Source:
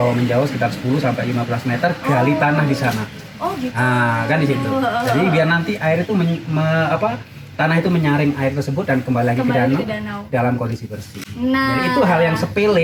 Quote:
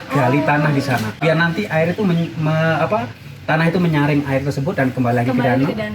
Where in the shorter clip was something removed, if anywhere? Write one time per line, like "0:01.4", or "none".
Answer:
0:01.2